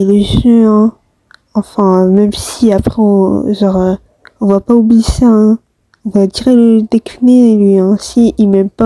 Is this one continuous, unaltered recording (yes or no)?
yes